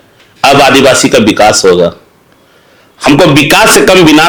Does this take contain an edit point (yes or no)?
no